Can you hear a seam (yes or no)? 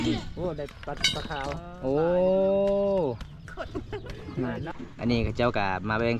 yes